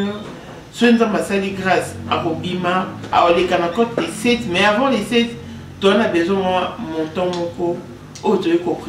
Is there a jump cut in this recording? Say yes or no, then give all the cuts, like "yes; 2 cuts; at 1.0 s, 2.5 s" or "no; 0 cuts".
yes; 1 cut; at 3.1 s